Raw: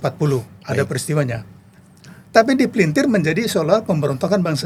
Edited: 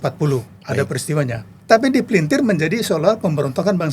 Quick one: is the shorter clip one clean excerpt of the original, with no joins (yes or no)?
no